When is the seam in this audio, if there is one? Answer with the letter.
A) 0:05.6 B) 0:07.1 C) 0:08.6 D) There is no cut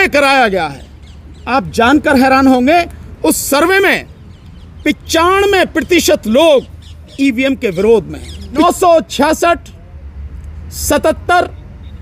C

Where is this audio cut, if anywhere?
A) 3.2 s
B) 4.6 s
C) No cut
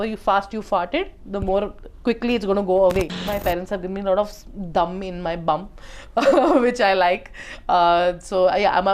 A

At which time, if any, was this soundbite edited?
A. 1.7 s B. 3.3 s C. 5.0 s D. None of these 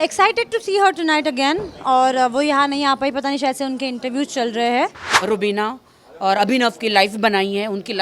C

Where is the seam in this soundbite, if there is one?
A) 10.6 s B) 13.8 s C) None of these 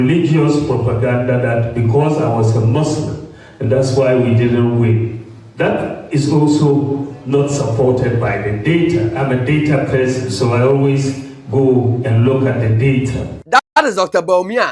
B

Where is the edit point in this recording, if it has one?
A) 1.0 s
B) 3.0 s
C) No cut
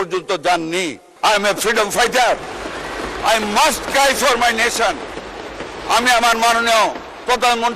A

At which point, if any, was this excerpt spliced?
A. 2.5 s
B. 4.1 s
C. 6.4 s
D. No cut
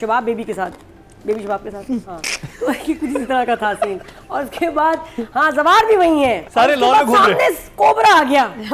C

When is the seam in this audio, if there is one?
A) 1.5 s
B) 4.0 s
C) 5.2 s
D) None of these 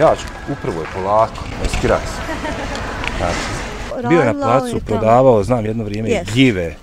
B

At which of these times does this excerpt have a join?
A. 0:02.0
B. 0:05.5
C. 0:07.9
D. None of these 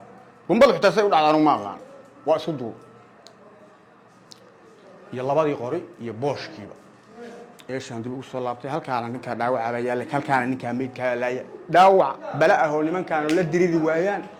D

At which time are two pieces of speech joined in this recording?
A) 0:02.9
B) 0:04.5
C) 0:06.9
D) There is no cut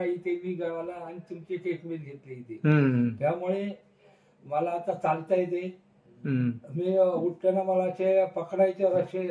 C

